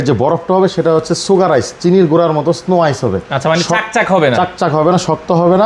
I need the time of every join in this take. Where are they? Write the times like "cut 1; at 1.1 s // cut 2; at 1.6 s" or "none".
none